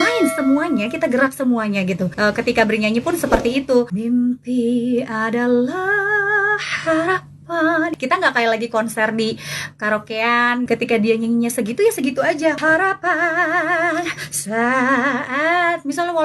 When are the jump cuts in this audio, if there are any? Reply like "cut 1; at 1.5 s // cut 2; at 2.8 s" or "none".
cut 1; at 2.1 s // cut 2; at 3.9 s // cut 3; at 7.9 s // cut 4; at 10.7 s // cut 5; at 12.6 s